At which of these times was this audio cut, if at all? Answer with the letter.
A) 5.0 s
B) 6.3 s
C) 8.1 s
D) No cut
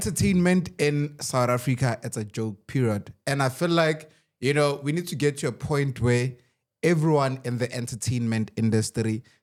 D